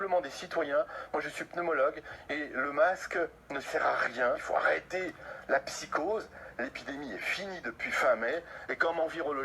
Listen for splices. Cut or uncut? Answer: cut